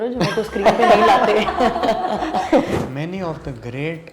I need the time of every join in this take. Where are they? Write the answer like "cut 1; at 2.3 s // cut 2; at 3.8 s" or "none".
cut 1; at 2.7 s